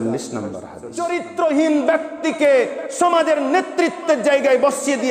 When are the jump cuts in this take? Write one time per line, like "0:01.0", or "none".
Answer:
0:01.0